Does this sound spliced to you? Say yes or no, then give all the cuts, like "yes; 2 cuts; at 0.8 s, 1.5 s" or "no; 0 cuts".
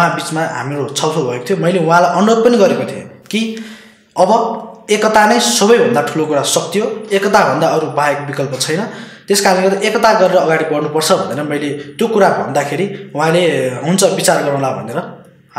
no; 0 cuts